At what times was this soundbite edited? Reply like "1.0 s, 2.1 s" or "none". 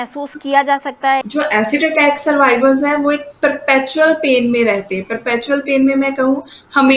1.3 s

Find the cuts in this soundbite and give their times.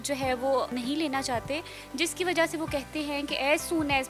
none

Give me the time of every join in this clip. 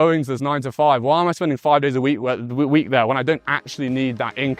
none

